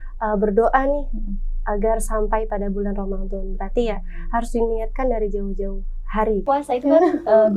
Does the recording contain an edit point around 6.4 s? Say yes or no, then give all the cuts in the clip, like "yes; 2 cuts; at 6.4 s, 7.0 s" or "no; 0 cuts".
yes; 1 cut; at 6.4 s